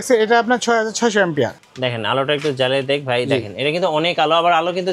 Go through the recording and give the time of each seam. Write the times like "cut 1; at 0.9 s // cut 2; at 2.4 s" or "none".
cut 1; at 1.6 s